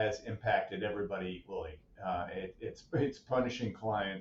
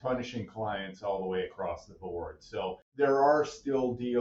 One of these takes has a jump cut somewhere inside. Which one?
second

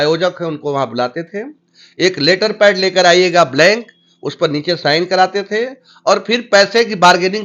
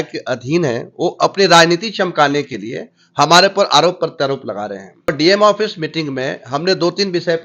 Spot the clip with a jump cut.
second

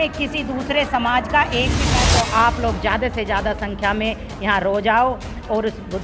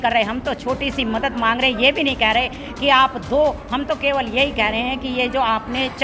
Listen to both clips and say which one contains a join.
first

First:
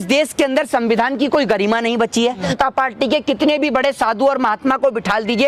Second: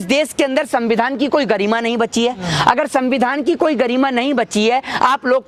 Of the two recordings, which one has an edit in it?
first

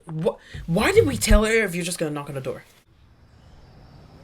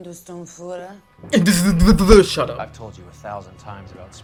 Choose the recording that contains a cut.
first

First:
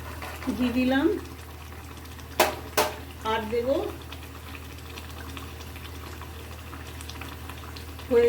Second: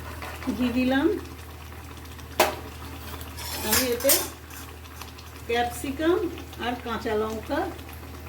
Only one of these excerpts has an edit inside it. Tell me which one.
second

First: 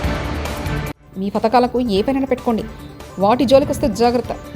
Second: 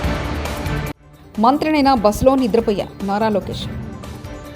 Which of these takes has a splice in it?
first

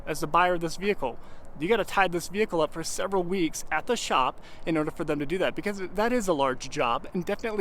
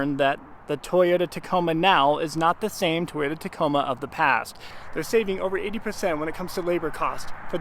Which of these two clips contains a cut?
second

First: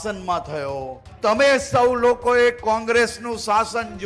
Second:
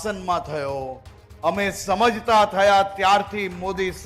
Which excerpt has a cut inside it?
first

